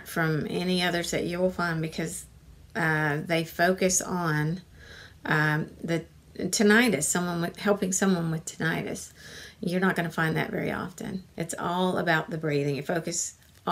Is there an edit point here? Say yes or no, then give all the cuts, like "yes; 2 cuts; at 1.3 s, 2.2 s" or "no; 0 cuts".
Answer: yes; 1 cut; at 11.3 s